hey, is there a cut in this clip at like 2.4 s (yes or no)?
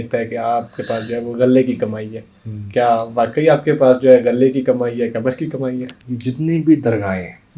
no